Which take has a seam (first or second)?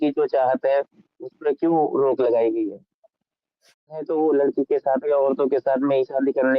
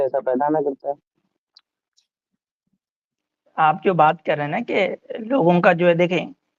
first